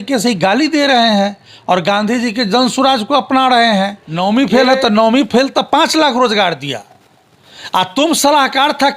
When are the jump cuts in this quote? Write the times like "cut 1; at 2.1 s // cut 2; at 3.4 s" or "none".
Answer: cut 1; at 4.0 s